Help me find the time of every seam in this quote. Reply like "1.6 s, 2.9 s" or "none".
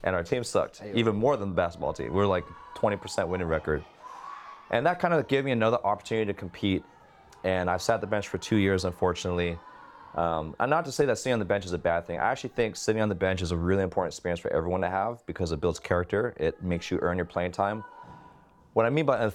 none